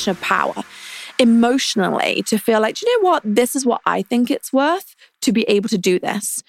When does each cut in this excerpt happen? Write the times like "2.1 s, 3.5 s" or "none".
none